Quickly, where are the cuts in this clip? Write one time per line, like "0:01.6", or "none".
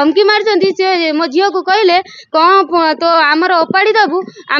none